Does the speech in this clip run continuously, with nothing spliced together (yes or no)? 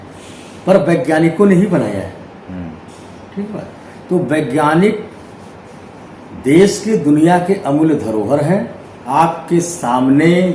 no